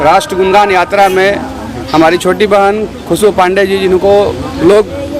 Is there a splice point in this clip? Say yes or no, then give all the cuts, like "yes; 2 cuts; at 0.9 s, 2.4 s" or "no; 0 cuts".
no; 0 cuts